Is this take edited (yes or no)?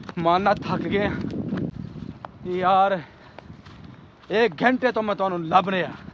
yes